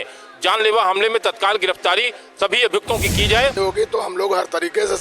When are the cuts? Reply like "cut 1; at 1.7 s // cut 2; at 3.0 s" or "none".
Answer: cut 1; at 3.6 s